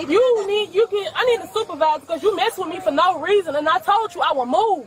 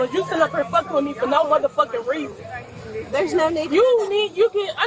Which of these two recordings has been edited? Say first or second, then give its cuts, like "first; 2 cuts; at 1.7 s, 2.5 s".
first; 1 cut; at 2.6 s